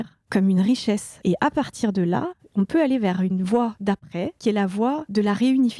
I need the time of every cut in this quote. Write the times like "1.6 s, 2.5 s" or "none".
1.1 s, 2.4 s